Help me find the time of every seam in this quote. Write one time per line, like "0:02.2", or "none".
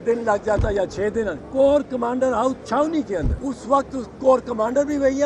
0:01.4
0:03.3